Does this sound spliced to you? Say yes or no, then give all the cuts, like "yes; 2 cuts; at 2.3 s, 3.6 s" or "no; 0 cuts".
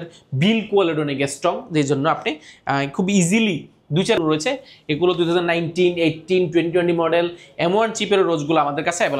yes; 1 cut; at 4.2 s